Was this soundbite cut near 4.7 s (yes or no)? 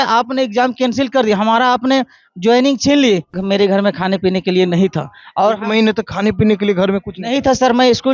no